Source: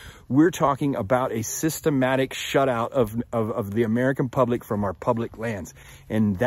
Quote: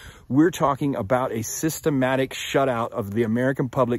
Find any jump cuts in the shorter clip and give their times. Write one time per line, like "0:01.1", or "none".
0:02.9